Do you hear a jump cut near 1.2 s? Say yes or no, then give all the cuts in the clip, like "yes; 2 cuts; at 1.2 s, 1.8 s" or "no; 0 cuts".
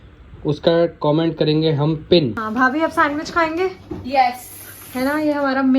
no; 1 cut; at 2.4 s